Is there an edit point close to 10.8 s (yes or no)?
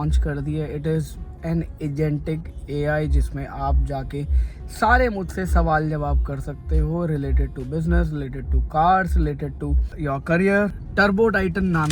yes